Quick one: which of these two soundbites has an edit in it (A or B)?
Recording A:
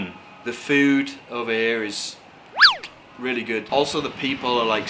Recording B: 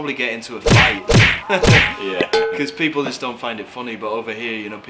A